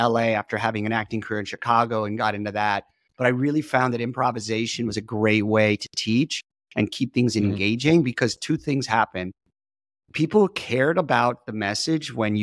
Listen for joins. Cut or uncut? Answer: uncut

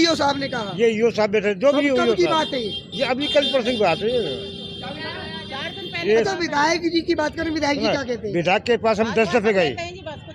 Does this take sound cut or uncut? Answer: uncut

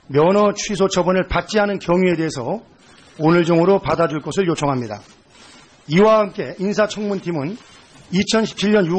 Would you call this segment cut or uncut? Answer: cut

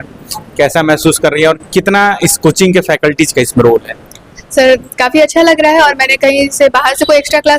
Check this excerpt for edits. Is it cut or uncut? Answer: uncut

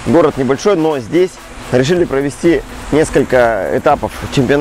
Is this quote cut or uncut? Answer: uncut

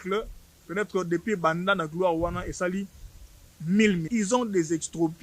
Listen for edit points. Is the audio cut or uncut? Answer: cut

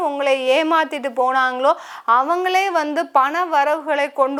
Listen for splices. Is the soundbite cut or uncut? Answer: uncut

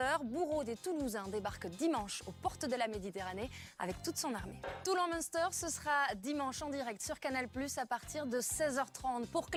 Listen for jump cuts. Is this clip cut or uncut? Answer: uncut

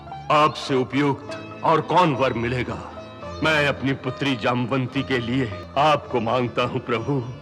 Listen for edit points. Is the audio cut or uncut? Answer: cut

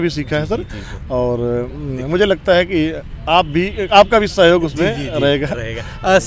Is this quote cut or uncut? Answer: uncut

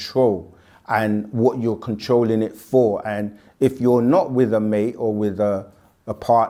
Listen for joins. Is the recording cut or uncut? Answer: uncut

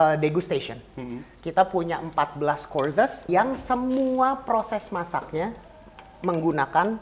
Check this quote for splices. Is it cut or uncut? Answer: cut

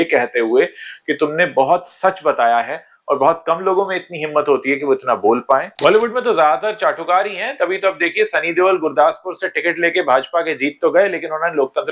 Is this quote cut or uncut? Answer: cut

